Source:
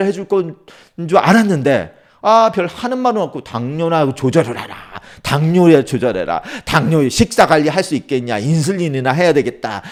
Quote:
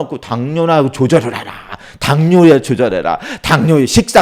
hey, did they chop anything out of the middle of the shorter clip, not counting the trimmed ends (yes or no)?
no